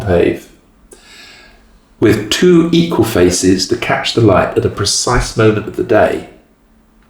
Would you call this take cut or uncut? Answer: uncut